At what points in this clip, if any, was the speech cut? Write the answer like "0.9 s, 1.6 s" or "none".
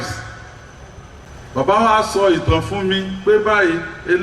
1.3 s